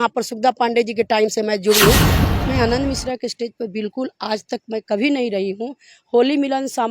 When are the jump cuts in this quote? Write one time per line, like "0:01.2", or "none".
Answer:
0:02.1